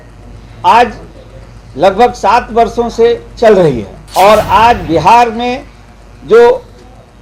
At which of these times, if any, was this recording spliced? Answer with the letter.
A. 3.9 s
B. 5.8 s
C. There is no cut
A